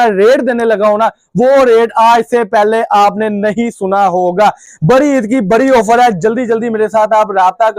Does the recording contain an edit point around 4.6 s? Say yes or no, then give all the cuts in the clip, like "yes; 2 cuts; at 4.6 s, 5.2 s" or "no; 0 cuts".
no; 0 cuts